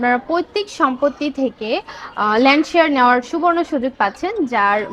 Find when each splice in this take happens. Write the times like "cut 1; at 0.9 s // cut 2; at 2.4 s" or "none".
none